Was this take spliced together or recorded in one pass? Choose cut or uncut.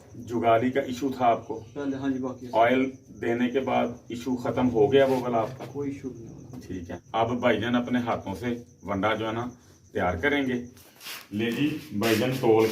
cut